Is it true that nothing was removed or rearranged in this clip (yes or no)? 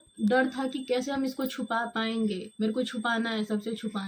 yes